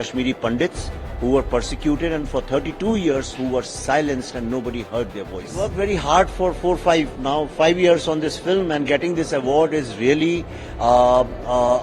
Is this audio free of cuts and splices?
no; 1 cut; at 5.7 s

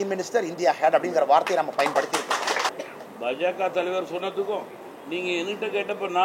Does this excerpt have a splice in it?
yes; 1 cut; at 2.7 s

